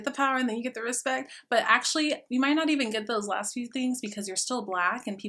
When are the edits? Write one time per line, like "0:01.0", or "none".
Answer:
none

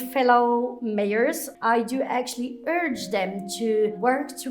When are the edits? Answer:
0:01.5

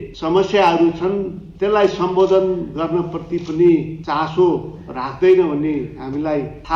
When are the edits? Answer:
0:04.0

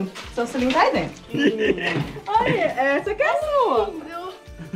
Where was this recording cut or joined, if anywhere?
0:01.2

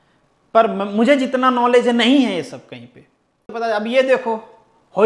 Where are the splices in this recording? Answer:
0:03.5

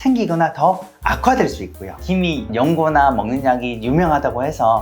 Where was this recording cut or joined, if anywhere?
0:02.0

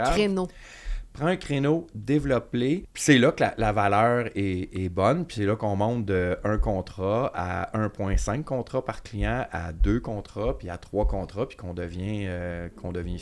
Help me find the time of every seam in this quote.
0:02.9

